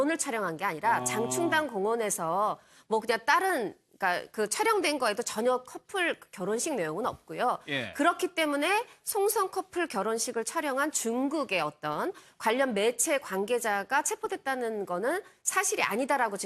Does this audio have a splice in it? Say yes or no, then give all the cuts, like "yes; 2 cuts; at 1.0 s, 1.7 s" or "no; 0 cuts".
yes; 1 cut; at 2.5 s